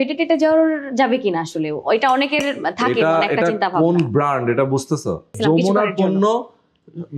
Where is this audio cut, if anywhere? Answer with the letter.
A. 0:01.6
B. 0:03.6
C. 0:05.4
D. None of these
C